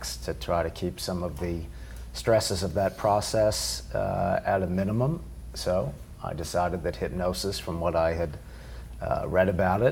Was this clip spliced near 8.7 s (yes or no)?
no